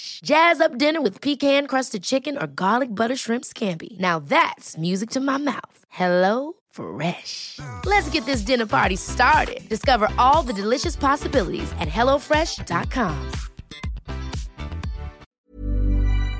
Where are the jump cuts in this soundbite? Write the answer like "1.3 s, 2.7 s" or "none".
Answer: 15.2 s